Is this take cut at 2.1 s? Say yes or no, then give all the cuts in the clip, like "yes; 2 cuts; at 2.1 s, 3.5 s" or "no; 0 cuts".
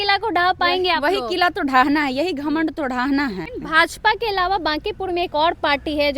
no; 1 cut; at 3.5 s